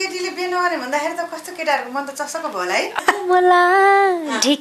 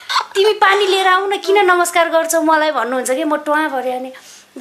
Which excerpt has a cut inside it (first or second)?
first